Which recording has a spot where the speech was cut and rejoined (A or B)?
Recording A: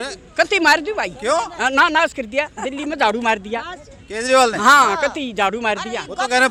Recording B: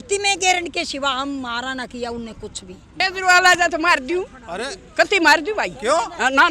B